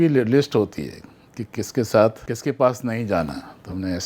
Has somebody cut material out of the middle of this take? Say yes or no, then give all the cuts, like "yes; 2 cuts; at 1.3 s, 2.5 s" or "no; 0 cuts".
yes; 1 cut; at 2.3 s